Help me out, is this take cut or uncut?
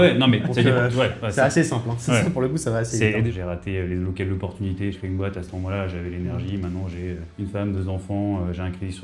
cut